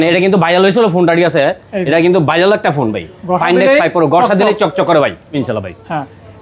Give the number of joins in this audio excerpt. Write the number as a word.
one